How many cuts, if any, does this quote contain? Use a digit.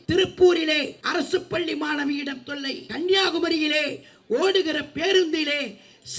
2